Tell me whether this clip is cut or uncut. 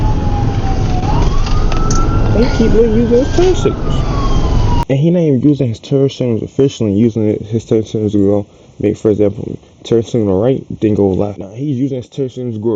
cut